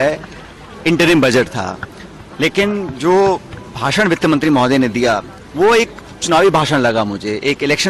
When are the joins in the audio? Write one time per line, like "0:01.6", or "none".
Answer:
none

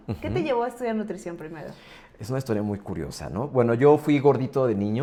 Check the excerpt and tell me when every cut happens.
none

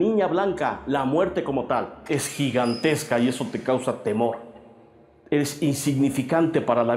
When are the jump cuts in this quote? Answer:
0:02.1

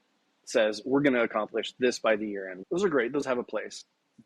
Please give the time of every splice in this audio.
0:02.5

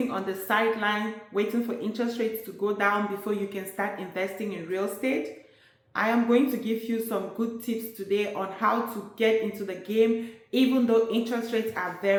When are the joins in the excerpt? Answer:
none

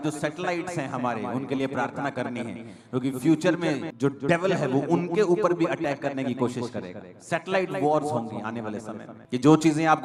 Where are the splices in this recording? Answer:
none

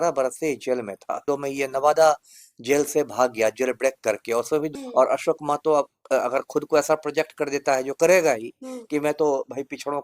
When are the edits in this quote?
0:01.2
0:04.7

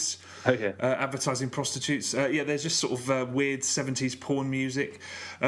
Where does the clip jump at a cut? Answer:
none

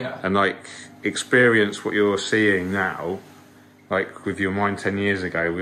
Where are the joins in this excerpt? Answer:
none

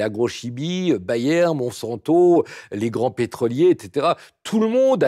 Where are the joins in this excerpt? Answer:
none

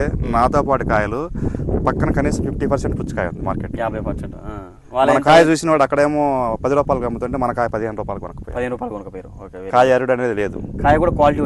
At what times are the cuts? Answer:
none

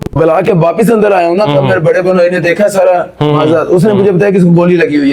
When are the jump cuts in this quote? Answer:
none

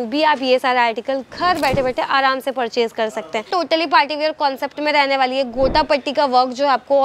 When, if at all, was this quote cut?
0:03.5

